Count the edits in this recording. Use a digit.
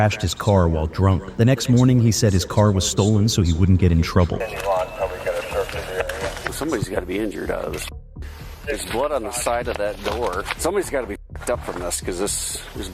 1